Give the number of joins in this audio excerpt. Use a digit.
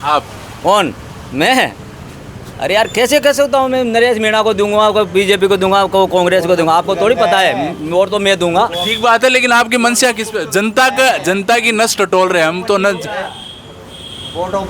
0